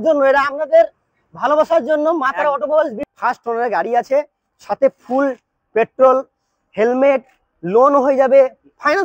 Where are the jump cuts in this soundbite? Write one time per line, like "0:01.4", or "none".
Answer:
0:03.0